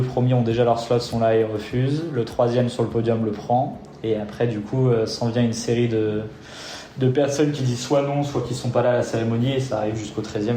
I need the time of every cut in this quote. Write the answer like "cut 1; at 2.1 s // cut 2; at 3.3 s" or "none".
none